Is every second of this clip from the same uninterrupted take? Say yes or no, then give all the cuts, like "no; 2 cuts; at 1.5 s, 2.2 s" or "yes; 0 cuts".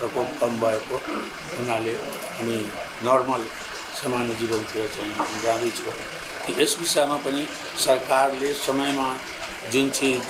yes; 0 cuts